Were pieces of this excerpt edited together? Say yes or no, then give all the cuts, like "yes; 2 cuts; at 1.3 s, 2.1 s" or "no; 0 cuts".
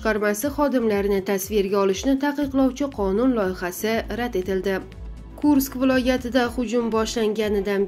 yes; 1 cut; at 5.0 s